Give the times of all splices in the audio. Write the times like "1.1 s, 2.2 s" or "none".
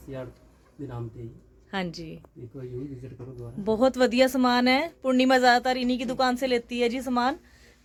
none

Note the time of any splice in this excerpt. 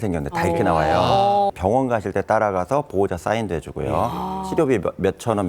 1.5 s

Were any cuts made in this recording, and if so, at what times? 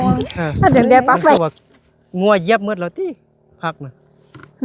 1.4 s

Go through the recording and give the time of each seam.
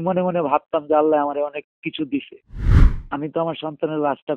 2.9 s

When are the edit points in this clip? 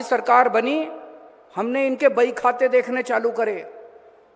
none

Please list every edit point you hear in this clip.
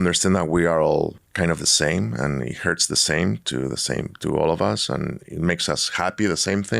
1.2 s

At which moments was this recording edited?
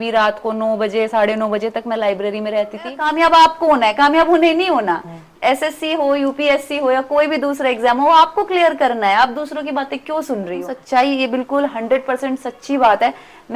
3.0 s, 10.5 s

